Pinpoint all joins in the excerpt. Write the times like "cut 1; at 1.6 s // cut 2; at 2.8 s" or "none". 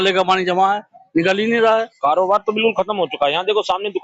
cut 1; at 1.7 s